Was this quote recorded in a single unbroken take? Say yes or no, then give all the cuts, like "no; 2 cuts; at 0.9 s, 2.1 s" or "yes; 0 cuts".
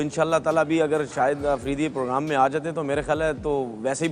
yes; 0 cuts